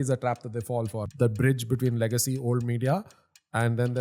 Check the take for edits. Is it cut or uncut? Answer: cut